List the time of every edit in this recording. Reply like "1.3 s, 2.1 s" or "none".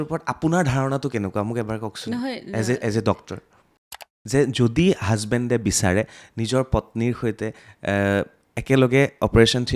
4.0 s